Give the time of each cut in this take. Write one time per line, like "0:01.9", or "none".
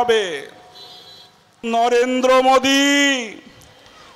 0:01.6

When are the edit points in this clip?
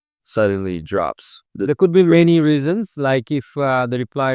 0:01.4

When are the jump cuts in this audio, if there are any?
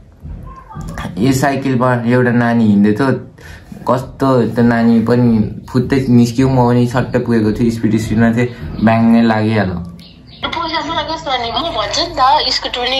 0:10.4

